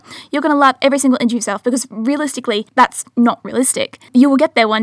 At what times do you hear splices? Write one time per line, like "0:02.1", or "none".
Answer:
0:02.7
0:04.1